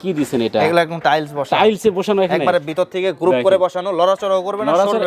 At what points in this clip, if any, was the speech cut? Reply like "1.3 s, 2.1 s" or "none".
none